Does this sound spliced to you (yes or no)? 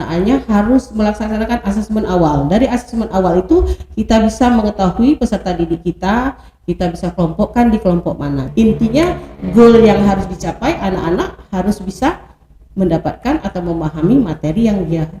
yes